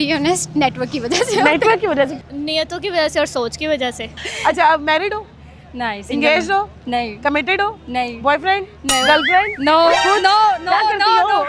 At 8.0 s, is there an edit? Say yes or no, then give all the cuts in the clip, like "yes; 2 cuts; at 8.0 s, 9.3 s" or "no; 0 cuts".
no; 2 cuts; at 2.2 s, 4.2 s